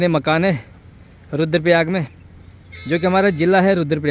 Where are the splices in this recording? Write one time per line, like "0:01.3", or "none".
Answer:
none